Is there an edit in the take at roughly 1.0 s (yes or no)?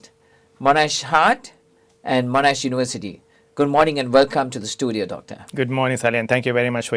yes